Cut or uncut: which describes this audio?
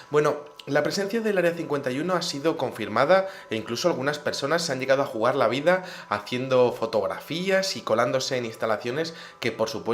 cut